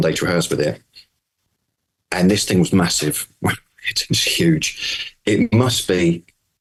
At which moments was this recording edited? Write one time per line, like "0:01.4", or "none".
none

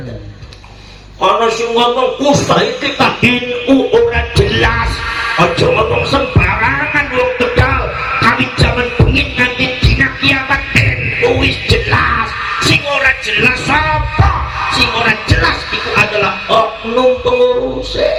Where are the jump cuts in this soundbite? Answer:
none

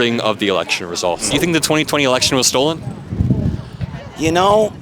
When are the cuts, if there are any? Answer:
0:01.3

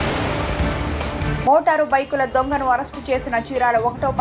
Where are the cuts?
0:01.3

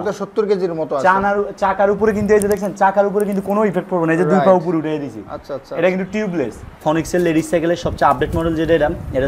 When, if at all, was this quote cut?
0:06.8

